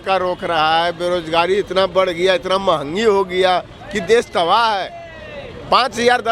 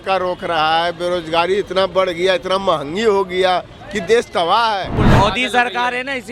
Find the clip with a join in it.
second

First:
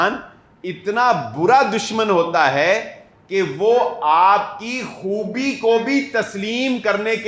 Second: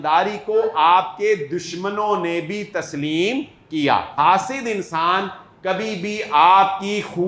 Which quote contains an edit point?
second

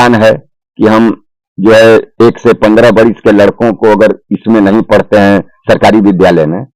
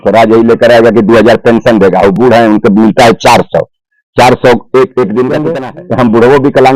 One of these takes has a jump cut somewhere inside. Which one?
second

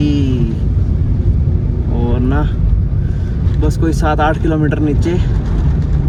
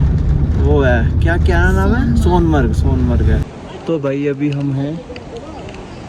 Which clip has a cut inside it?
second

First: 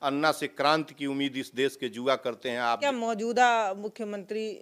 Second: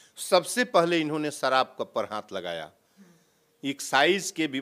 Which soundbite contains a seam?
first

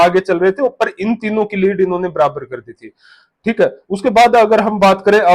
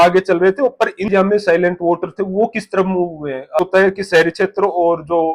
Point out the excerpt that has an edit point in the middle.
second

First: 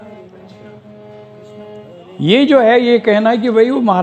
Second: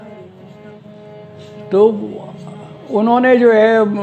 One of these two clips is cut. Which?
first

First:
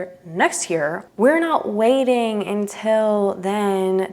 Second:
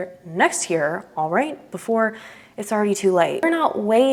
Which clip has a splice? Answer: first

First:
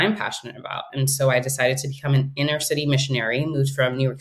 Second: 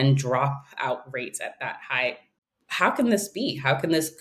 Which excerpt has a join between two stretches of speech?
second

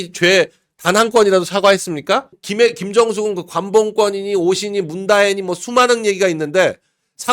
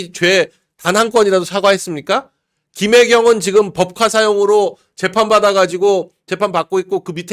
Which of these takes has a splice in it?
first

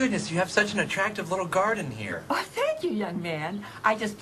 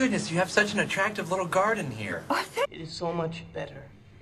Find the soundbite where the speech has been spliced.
second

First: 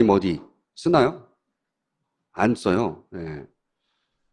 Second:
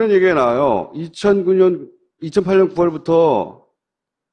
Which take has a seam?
second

